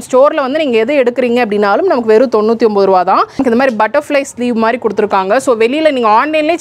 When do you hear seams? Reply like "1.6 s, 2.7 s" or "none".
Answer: 3.4 s